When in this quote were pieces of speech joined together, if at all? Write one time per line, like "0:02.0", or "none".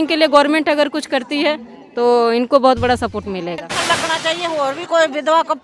0:03.6